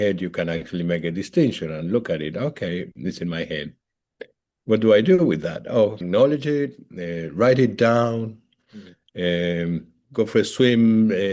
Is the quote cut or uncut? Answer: cut